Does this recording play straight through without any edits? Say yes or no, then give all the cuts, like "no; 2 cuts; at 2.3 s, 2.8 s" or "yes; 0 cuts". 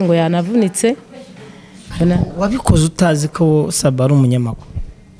yes; 0 cuts